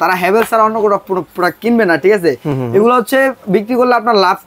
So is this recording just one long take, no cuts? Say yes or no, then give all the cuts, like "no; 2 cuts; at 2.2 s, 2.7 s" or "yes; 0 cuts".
yes; 0 cuts